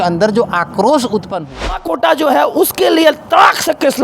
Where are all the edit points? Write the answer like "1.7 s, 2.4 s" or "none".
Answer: 1.8 s